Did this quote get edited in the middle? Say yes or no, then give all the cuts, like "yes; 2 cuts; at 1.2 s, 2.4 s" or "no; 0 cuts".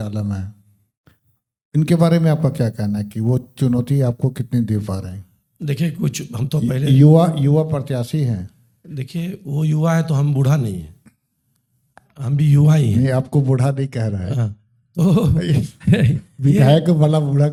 no; 0 cuts